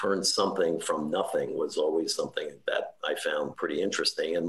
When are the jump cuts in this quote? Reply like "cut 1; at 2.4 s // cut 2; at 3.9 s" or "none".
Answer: none